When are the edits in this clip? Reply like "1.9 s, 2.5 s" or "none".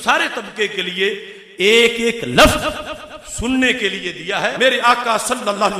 4.5 s